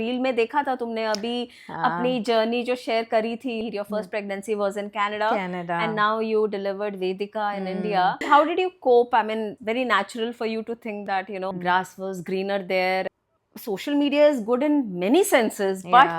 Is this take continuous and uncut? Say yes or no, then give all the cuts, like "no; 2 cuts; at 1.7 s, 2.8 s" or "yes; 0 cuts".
no; 5 cuts; at 3.6 s, 8.2 s, 9.5 s, 11.5 s, 13.1 s